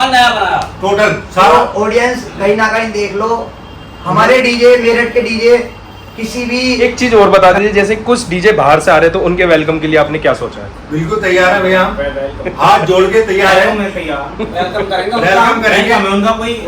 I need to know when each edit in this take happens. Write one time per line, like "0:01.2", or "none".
0:06.8